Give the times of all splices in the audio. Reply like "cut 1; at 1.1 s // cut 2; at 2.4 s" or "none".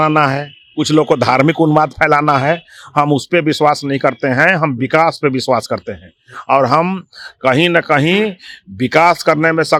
none

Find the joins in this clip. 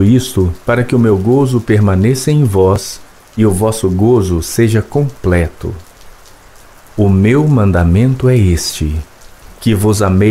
none

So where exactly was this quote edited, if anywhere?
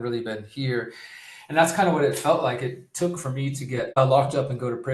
cut 1; at 4.0 s

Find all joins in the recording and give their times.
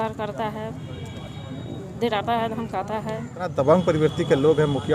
cut 1; at 3.5 s

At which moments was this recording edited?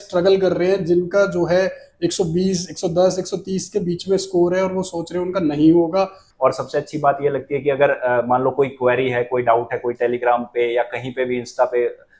cut 1; at 6.2 s

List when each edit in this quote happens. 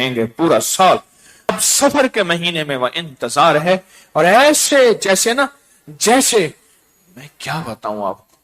cut 1; at 1.5 s

